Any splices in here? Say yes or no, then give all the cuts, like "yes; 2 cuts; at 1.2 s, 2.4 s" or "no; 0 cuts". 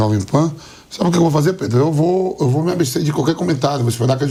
no; 0 cuts